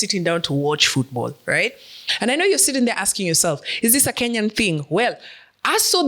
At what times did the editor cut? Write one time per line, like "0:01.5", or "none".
0:02.0